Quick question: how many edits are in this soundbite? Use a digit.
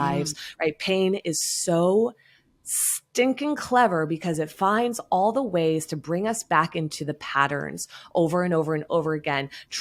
0